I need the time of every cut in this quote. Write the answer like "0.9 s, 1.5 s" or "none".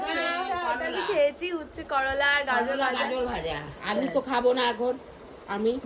none